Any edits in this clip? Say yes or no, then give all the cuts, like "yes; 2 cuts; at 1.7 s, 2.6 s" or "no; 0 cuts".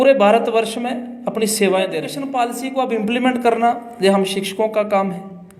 yes; 1 cut; at 2.2 s